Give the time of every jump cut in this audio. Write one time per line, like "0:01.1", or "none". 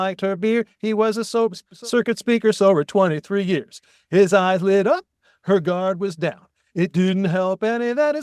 0:01.7

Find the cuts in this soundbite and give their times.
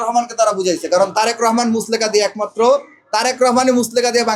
none

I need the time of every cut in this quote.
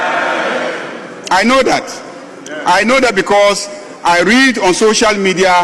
none

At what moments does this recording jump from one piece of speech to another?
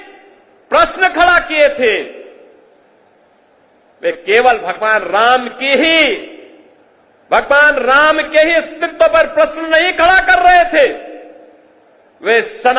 none

